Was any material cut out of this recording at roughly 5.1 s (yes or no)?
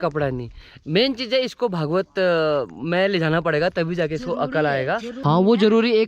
yes